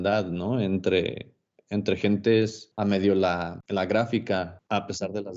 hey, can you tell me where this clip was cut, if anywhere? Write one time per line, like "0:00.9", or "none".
0:02.6
0:03.5
0:04.6